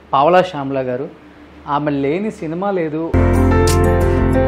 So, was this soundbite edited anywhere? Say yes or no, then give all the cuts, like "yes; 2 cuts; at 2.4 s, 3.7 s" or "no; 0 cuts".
yes; 1 cut; at 3.1 s